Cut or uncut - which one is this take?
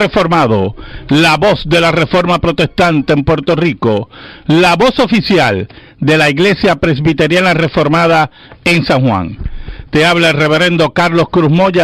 uncut